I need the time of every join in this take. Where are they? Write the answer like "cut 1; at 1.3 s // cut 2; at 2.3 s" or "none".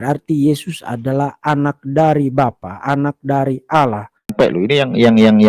cut 1; at 4.3 s